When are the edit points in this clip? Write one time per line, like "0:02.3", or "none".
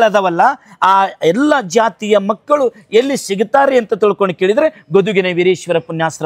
none